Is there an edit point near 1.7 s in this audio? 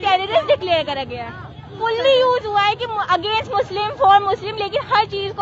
yes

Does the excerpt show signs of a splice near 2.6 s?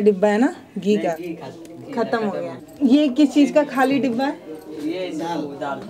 yes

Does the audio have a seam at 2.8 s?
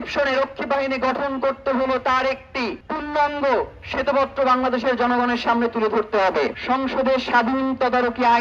yes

